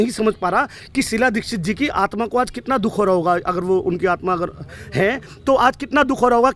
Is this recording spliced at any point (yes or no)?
no